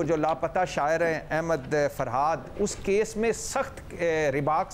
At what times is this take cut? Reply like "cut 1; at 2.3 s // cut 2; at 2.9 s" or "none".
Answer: none